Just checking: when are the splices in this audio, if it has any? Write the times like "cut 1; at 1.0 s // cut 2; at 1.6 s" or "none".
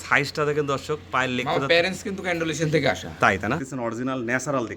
cut 1; at 3.6 s